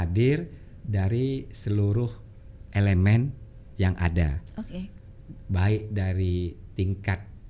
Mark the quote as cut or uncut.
uncut